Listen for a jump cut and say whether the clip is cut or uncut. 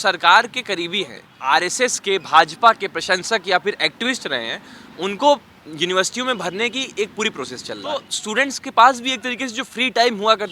cut